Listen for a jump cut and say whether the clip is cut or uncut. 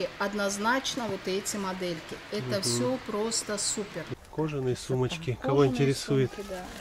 cut